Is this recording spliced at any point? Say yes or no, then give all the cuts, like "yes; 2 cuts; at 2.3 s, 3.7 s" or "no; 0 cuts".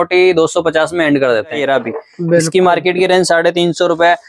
yes; 1 cut; at 1.6 s